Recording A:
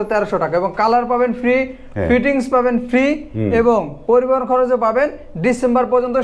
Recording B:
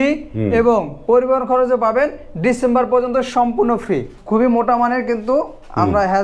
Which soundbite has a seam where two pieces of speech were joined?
B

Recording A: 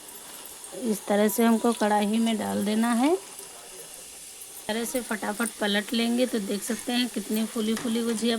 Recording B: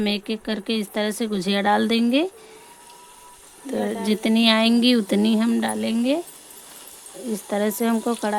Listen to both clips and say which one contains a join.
A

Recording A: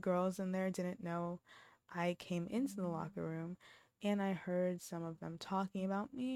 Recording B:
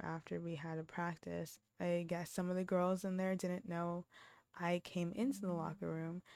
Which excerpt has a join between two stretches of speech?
B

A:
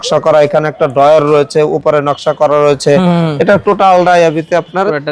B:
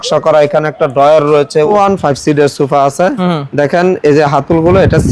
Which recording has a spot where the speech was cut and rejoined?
B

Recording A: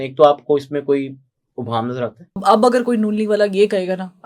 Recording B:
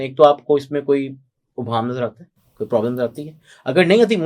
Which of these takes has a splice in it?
A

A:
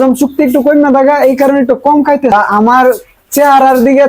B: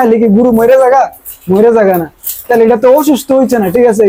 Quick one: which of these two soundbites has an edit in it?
A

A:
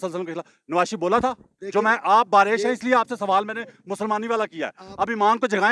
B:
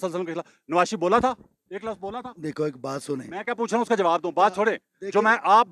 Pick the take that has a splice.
A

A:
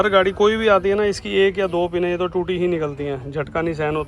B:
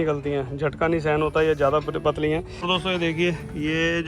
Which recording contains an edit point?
B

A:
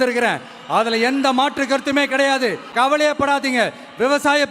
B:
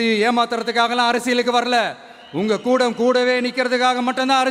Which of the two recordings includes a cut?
A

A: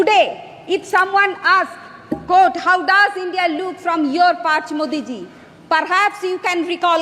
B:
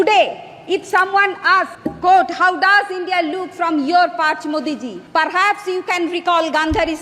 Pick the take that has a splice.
B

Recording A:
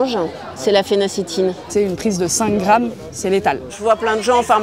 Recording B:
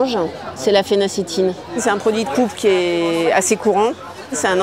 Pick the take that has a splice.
A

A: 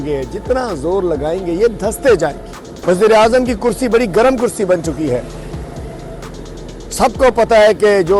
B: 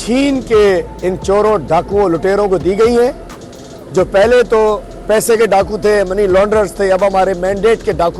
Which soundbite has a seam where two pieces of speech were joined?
A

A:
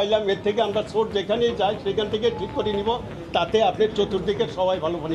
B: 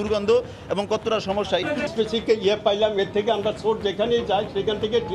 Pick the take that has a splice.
B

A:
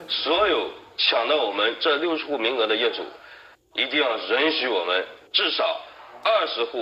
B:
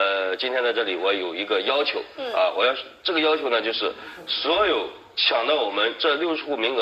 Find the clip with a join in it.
A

